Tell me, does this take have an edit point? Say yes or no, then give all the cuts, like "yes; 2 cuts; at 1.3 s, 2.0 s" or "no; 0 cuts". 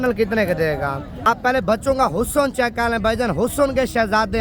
yes; 1 cut; at 1.1 s